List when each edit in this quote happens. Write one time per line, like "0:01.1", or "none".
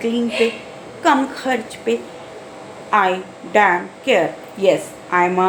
none